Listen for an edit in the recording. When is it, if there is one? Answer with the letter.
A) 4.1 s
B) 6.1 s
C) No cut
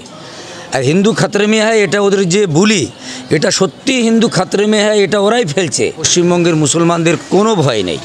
B